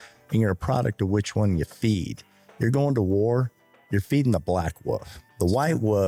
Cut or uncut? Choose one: uncut